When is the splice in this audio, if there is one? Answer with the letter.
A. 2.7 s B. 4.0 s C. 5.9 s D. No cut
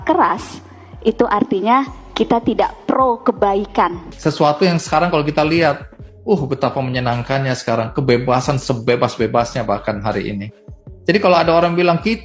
B